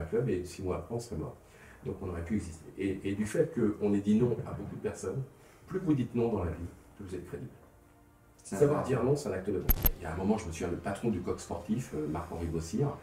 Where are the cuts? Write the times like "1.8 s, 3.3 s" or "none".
9.8 s